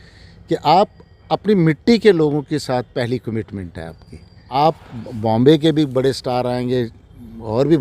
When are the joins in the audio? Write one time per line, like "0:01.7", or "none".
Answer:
0:04.6